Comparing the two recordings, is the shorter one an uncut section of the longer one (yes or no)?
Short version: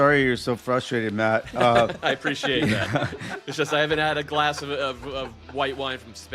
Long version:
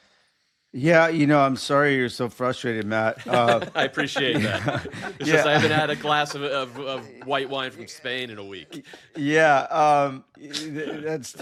yes